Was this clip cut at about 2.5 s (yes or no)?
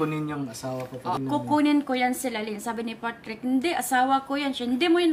no